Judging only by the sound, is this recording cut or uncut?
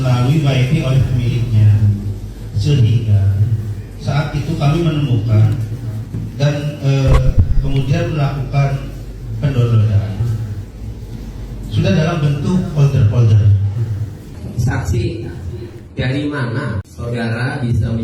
cut